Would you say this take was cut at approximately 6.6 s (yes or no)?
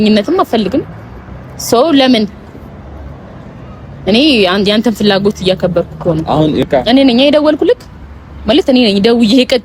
yes